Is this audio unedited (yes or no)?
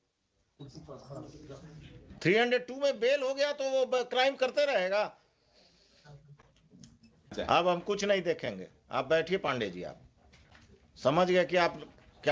no